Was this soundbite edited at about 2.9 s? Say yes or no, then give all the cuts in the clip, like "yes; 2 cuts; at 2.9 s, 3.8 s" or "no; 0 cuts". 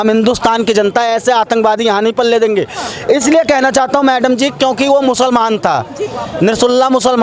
no; 0 cuts